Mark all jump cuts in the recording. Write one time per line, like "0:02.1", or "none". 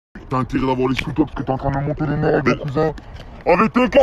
none